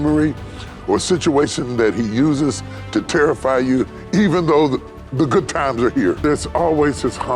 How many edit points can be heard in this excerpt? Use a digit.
1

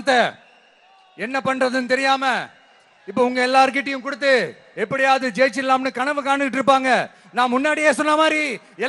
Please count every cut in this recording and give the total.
0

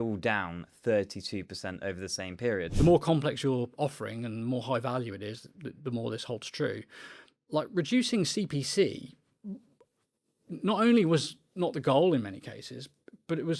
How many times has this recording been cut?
1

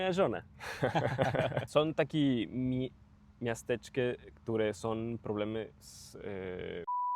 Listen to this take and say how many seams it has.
1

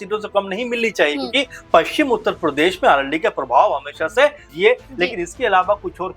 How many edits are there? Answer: 1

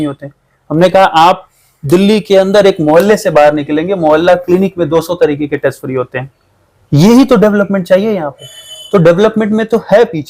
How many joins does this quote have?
0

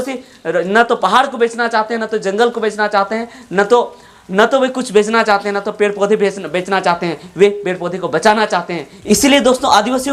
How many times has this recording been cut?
0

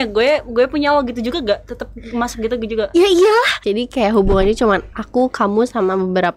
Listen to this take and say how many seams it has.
1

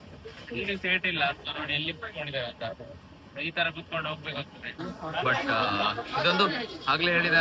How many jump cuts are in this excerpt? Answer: 1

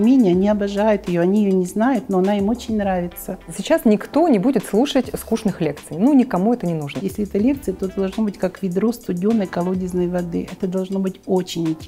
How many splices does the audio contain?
2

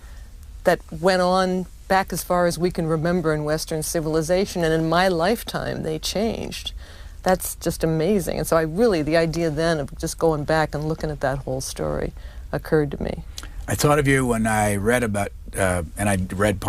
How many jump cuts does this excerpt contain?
1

